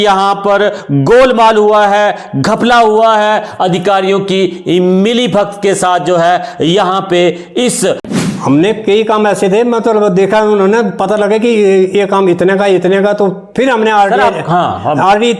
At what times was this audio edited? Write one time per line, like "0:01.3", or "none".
0:08.1